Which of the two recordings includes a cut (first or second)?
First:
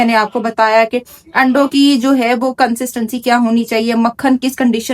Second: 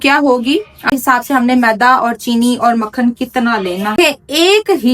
second